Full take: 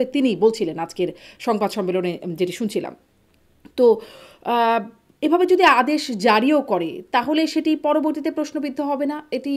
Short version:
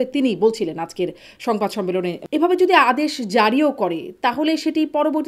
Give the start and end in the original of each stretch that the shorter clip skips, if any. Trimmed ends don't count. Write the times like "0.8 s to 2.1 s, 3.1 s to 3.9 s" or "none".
2.2 s to 5.1 s